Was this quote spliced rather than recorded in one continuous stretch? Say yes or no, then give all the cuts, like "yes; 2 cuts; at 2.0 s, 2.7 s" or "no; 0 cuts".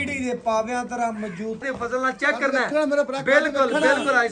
yes; 1 cut; at 1.6 s